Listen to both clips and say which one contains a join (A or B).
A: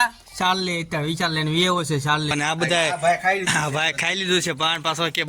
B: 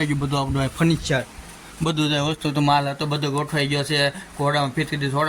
A